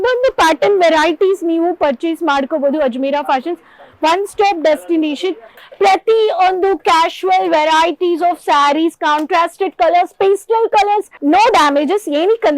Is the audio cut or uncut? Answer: cut